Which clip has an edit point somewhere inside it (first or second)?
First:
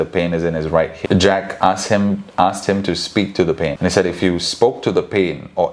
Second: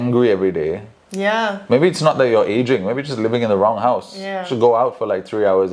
first